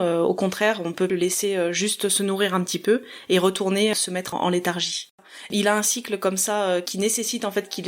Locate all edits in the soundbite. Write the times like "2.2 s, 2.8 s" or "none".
1.1 s, 3.9 s, 5.4 s